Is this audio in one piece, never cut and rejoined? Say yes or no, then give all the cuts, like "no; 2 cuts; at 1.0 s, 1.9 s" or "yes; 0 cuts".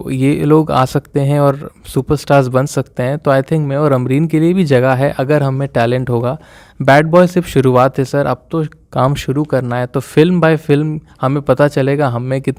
yes; 0 cuts